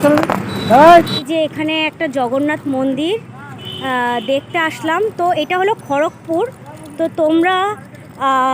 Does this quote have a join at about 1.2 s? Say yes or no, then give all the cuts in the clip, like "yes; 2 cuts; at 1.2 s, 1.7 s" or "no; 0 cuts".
yes; 1 cut; at 1.2 s